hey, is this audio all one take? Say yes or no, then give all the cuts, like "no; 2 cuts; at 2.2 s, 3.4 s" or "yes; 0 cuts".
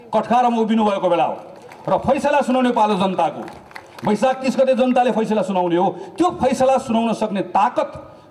yes; 0 cuts